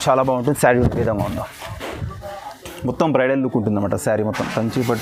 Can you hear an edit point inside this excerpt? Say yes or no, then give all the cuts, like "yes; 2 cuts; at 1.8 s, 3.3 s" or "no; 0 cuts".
no; 0 cuts